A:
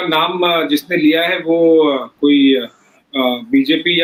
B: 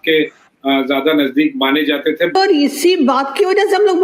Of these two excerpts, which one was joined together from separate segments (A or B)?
B